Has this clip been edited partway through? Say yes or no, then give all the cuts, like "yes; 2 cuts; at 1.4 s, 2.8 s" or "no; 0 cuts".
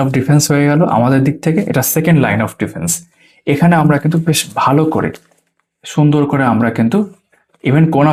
no; 0 cuts